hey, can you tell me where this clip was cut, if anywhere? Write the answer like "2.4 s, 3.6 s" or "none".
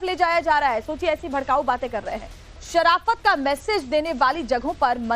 2.8 s